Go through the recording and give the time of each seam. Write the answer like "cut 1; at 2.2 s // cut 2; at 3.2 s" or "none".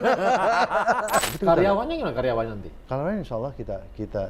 cut 1; at 1.3 s